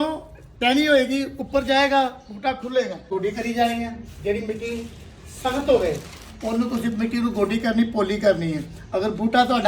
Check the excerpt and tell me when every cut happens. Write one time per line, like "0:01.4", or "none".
0:03.1